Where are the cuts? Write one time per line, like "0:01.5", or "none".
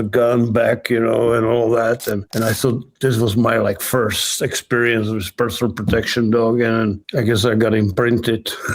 0:02.3
0:07.0